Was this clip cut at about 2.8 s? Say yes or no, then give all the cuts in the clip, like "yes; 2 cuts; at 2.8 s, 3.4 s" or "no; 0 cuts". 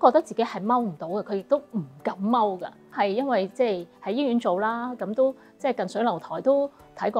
no; 0 cuts